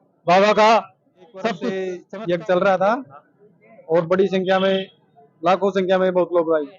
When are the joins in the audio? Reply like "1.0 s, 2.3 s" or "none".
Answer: 2.0 s